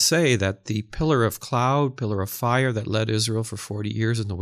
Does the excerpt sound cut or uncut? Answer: uncut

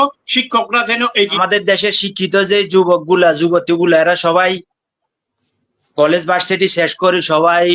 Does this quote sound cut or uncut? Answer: cut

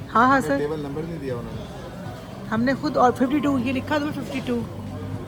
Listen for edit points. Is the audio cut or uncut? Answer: uncut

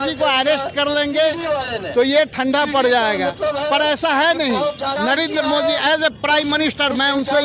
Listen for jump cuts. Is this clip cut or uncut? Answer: cut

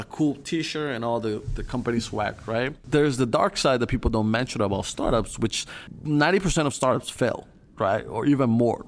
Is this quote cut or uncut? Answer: cut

